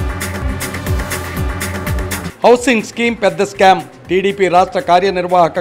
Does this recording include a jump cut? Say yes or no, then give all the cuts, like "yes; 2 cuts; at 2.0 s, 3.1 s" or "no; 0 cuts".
yes; 1 cut; at 2.2 s